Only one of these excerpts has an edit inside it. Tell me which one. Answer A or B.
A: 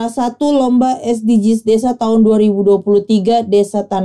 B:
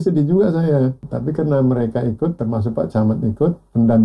B